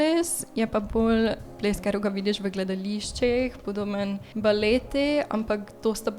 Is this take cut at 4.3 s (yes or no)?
yes